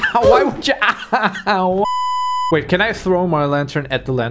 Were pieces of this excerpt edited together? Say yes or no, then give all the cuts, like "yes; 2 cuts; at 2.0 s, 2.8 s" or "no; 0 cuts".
yes; 1 cut; at 1.8 s